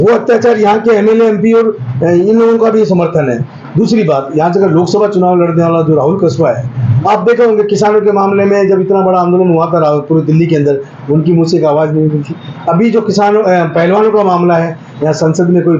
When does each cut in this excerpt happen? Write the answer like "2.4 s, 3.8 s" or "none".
none